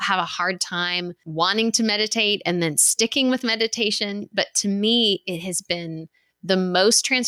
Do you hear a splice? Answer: yes; 1 cut; at 1.2 s

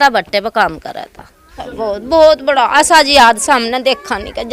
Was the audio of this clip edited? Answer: no; 0 cuts

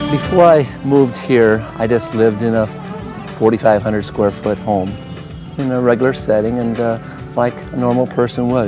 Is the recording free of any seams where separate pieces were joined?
no; 1 cut; at 5.7 s

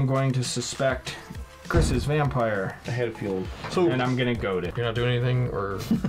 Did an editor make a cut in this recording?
yes; 1 cut; at 4.7 s

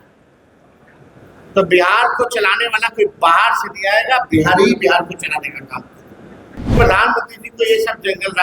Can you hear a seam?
yes; 1 cut; at 6.8 s

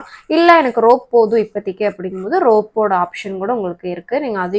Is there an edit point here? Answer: no; 0 cuts

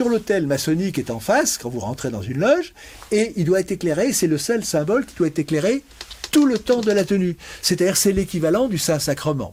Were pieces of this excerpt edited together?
no; 0 cuts

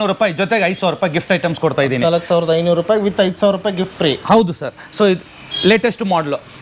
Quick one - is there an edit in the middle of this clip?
no; 0 cuts

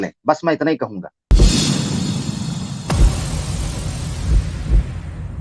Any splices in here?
no; 0 cuts

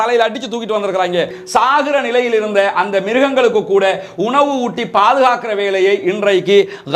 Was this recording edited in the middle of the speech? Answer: yes; 1 cut; at 1.4 s

